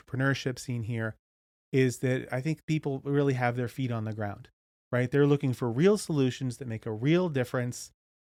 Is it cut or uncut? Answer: uncut